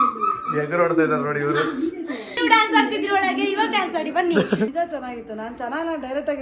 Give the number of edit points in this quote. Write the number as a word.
two